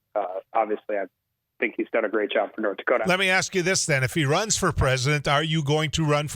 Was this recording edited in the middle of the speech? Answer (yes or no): yes